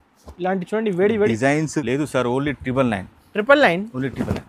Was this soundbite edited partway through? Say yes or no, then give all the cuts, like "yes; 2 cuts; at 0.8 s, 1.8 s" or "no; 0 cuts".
yes; 1 cut; at 1.8 s